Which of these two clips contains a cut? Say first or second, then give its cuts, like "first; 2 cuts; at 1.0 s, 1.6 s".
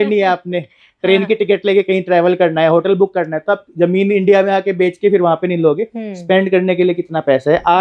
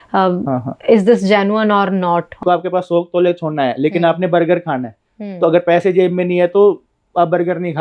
second; 1 cut; at 2.4 s